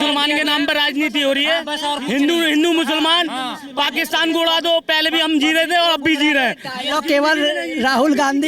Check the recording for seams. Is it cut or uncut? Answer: uncut